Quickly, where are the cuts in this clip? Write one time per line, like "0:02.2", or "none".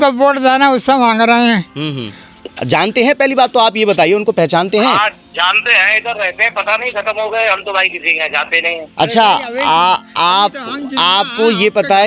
0:02.3